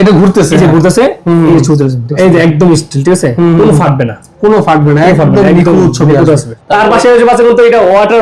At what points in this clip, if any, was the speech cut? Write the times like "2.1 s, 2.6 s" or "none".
2.0 s, 6.5 s